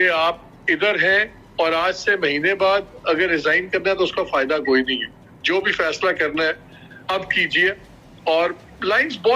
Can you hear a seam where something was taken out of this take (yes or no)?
yes